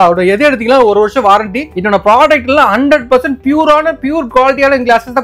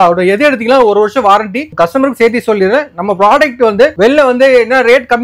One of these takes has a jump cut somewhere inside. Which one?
first; 1 cut; at 1.7 s

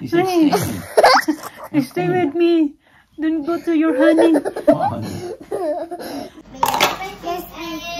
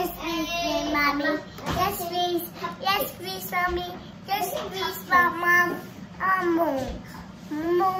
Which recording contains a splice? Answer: first; 1 cut; at 6.4 s

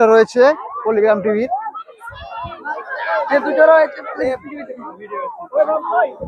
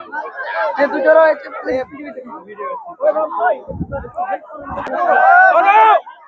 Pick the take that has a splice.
second; 1 cut; at 4.9 s

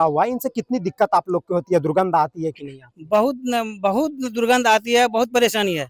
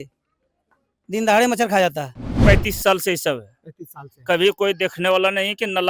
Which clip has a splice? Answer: second; 1 cut; at 2.4 s

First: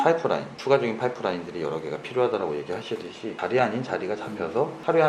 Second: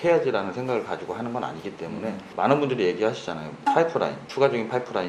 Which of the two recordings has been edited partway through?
first; 1 cut; at 3.3 s

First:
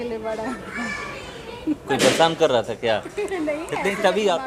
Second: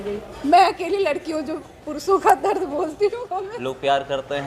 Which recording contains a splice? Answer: second; 1 cut; at 3.5 s

